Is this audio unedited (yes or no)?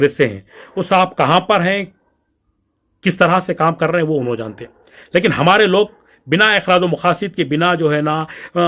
yes